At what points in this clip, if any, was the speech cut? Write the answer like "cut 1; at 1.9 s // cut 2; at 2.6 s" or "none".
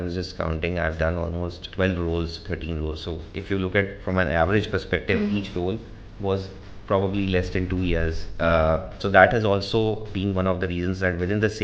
cut 1; at 1.6 s // cut 2; at 9.0 s